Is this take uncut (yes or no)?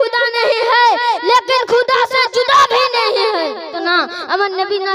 no